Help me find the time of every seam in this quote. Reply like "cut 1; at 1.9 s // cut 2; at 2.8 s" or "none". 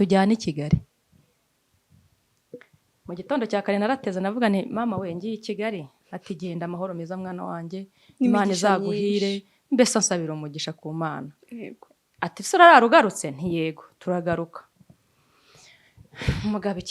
none